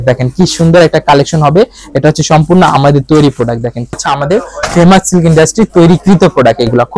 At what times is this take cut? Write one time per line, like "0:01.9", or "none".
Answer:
0:04.0